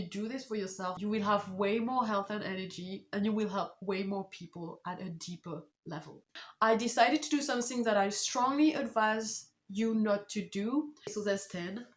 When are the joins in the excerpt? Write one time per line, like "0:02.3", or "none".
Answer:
0:01.0
0:06.4
0:11.1